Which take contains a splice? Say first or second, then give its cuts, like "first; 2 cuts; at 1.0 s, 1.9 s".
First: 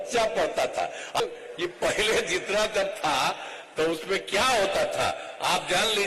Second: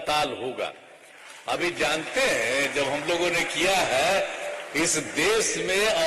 first; 1 cut; at 1.2 s